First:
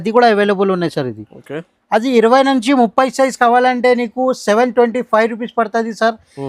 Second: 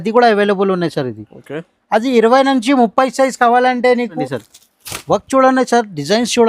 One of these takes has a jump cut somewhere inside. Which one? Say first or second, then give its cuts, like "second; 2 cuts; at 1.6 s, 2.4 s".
second; 1 cut; at 4.2 s